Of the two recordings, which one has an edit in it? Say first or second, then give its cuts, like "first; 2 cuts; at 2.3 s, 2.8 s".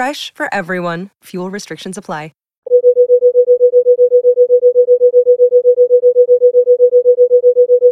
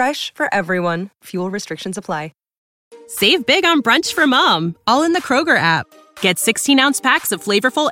second; 1 cut; at 2.6 s